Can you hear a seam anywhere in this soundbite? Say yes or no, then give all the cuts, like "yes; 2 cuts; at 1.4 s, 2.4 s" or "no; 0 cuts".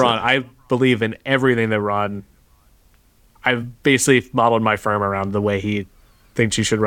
no; 0 cuts